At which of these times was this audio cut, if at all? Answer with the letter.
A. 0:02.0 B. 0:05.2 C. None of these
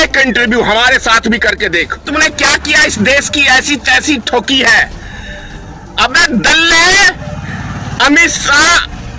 A